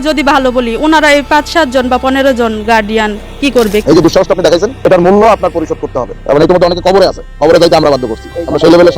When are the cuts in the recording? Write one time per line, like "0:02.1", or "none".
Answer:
0:03.8
0:06.2